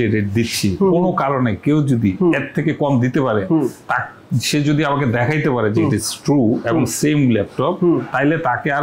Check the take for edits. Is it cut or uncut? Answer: uncut